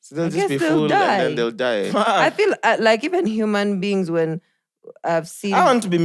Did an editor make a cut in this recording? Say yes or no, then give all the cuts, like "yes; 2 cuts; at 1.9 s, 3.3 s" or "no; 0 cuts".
no; 0 cuts